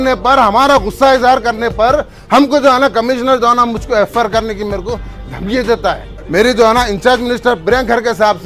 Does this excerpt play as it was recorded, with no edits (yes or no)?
no